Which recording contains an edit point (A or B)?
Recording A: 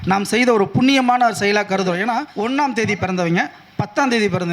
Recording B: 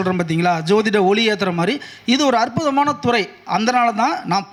A